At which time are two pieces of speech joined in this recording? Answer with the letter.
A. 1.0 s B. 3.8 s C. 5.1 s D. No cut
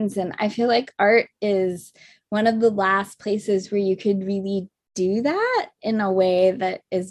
D